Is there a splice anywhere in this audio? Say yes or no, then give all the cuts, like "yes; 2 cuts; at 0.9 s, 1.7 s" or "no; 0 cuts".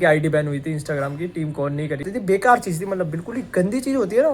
yes; 1 cut; at 2.1 s